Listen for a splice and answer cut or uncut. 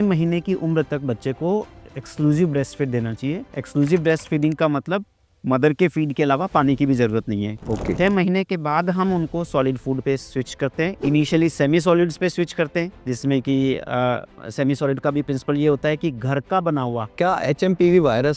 cut